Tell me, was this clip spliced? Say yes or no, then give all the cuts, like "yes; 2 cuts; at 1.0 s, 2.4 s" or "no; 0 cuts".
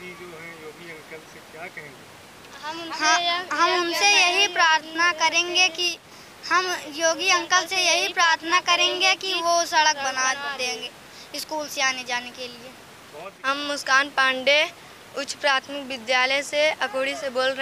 yes; 1 cut; at 13.4 s